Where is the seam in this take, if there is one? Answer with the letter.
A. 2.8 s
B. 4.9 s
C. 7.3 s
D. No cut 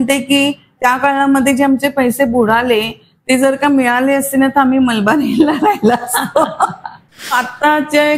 C